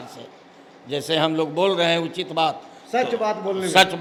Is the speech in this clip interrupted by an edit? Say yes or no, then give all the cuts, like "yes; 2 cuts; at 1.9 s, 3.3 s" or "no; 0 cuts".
no; 0 cuts